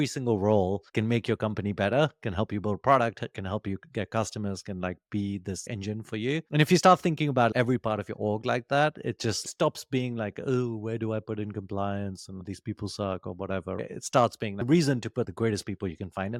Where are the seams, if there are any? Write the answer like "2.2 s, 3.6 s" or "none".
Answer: none